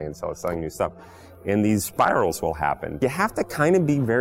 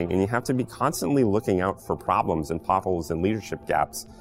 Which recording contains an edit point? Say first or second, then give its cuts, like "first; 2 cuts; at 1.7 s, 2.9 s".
first; 1 cut; at 3.0 s